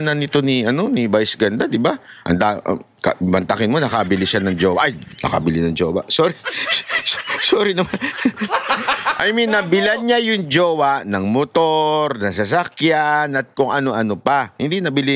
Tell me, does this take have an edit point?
no; 0 cuts

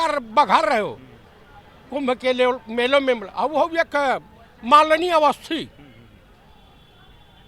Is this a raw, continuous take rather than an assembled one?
yes; 0 cuts

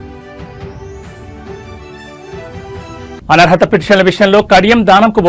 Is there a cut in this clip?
yes; 1 cut; at 3.2 s

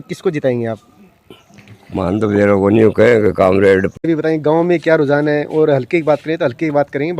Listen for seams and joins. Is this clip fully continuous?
no; 1 cut; at 4.0 s

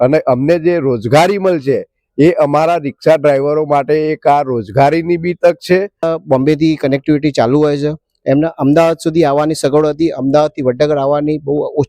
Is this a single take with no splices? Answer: no; 1 cut; at 6.0 s

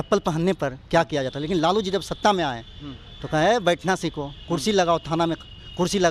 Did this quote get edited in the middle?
no; 0 cuts

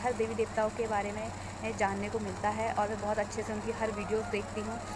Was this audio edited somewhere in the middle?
no; 0 cuts

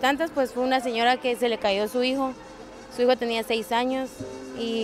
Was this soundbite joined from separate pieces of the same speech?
no; 0 cuts

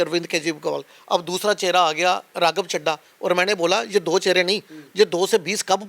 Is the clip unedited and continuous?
yes; 0 cuts

